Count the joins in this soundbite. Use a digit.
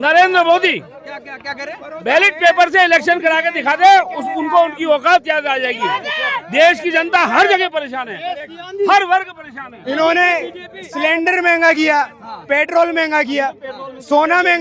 0